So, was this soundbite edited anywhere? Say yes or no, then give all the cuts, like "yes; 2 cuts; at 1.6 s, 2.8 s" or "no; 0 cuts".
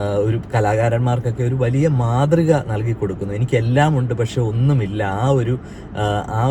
no; 0 cuts